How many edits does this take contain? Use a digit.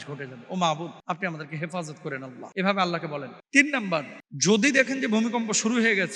4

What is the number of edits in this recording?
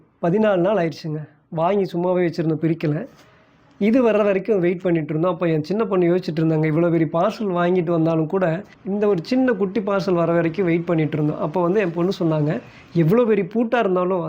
1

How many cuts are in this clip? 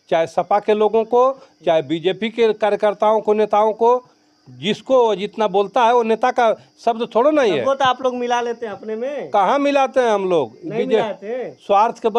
0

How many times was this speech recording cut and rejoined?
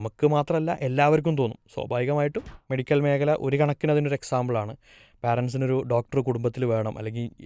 1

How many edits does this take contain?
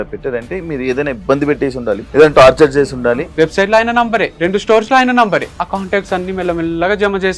4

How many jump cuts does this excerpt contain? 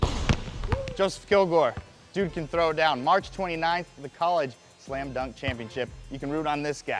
0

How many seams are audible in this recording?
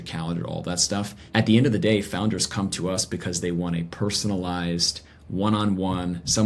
1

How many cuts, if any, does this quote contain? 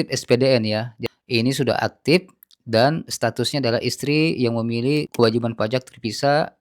1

